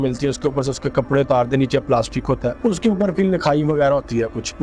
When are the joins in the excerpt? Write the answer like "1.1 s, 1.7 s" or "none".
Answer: none